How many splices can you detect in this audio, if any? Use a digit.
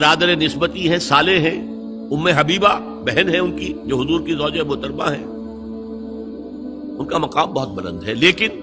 2